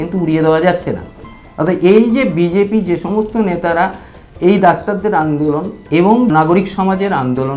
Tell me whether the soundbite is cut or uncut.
cut